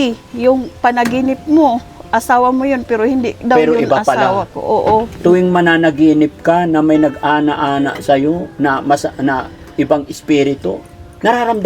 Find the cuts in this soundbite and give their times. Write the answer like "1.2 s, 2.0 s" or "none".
5.1 s